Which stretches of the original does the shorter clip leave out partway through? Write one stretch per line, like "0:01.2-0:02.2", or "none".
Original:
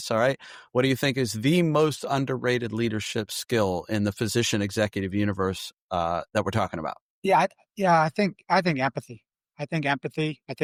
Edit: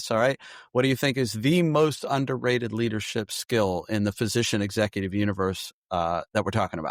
none